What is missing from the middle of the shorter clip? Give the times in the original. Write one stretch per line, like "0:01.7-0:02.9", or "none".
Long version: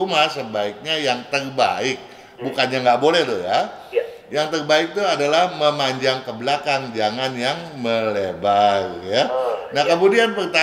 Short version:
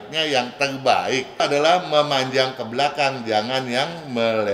0:02.1-0:05.1